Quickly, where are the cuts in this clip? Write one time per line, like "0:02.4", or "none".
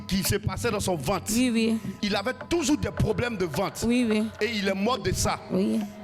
0:01.9